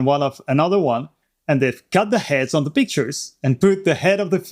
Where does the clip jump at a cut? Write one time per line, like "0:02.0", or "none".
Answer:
none